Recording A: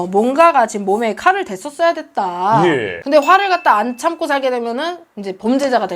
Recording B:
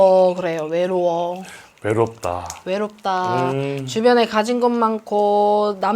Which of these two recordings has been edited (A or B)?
A